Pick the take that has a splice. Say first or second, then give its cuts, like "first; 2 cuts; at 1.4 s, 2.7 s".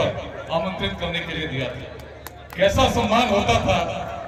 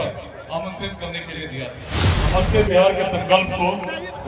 second; 1 cut; at 2.1 s